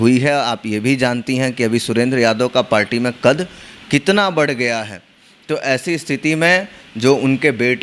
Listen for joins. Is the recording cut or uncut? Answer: uncut